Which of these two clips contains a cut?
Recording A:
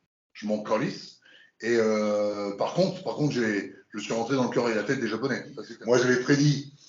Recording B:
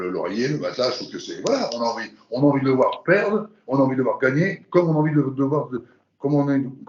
A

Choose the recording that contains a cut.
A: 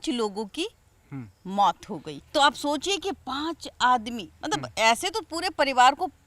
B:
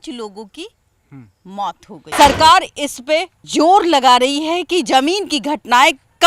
B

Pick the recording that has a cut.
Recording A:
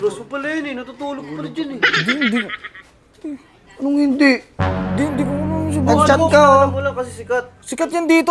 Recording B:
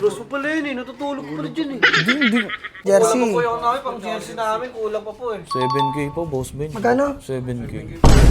B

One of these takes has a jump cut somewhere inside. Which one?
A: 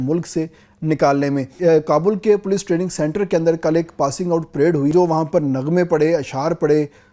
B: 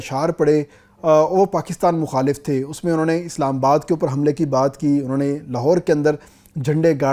A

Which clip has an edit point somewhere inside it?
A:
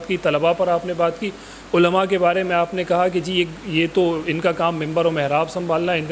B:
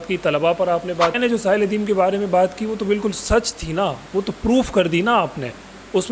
B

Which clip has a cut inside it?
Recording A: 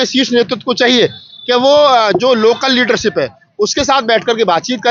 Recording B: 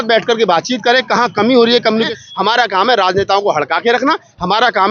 B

